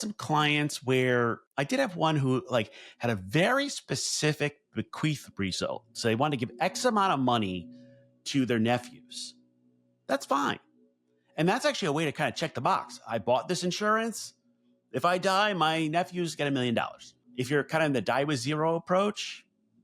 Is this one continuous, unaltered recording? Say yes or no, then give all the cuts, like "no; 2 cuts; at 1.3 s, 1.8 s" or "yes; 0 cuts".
no; 1 cut; at 1.5 s